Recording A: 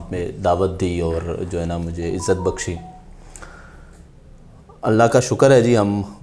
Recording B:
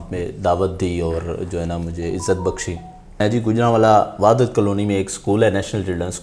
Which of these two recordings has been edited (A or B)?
B